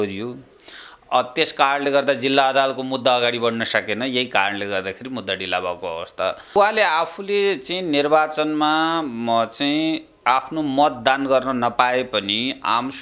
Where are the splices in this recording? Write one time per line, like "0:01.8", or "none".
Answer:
0:06.5